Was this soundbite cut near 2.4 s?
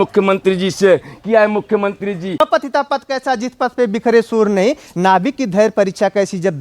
yes; 1 cut; at 2.4 s

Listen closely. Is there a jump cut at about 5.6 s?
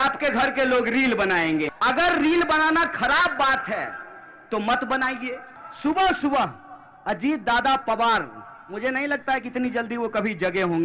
yes; 2 cuts; at 1.7 s, 5.6 s

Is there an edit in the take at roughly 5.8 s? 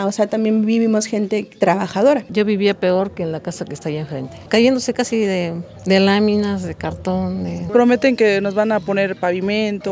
no; 2 cuts; at 2.2 s, 7.5 s

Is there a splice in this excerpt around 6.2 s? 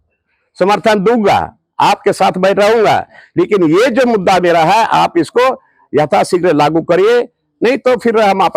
no; 0 cuts

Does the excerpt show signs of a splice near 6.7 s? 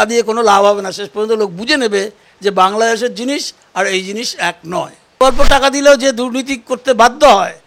no; 1 cut; at 5.1 s

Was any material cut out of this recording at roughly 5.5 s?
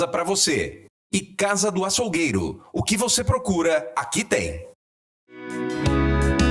yes; 1 cut; at 5.5 s

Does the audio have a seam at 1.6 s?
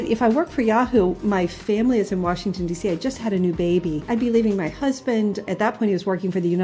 no; 2 cuts; at 4.0 s, 5.5 s

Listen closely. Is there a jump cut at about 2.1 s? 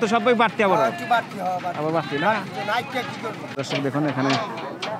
no; 1 cut; at 3.6 s

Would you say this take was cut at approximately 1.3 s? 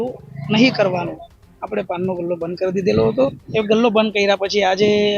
no; 1 cut; at 3.4 s

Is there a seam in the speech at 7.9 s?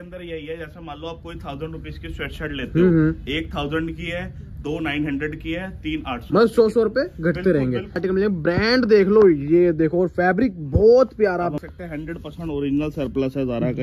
yes; 2 cuts; at 7.9 s, 11.6 s

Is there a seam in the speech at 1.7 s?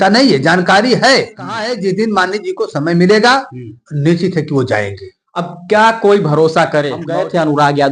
yes; 2 cuts; at 1.7 s, 7.1 s

